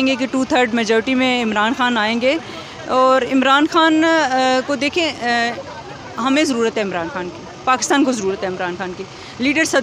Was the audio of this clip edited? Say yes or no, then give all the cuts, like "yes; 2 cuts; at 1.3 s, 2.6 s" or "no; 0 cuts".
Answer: no; 0 cuts